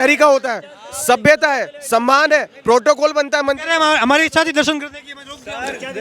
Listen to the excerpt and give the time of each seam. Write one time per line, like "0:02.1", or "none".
none